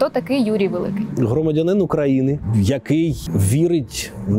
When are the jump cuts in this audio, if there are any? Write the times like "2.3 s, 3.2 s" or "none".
1.1 s, 2.5 s, 3.2 s

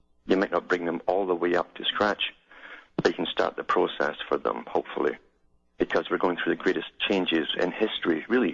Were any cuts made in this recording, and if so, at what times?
1.2 s

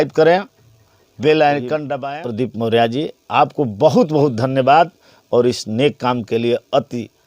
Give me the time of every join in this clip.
2.0 s

